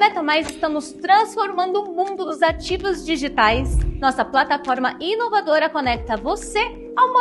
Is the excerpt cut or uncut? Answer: uncut